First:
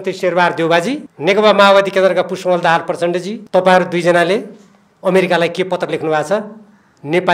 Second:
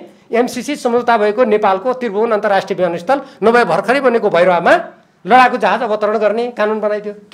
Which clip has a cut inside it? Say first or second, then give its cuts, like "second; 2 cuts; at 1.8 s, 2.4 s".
first; 2 cuts; at 1.1 s, 3.4 s